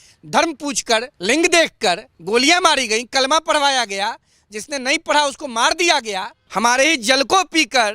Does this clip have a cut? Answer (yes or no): yes